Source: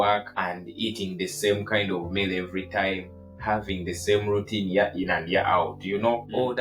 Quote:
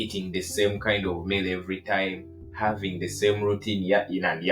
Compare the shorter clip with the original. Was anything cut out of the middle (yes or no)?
no